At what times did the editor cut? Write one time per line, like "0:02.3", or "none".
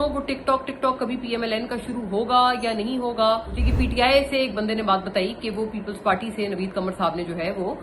0:03.6